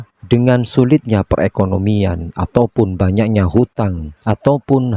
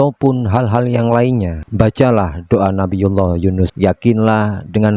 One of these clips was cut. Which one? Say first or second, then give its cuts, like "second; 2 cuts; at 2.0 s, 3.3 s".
second; 1 cut; at 3.7 s